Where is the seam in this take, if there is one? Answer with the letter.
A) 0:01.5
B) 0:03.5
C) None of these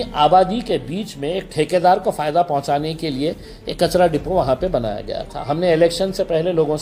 C